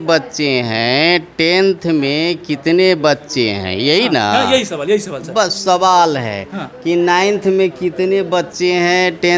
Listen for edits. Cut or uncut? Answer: uncut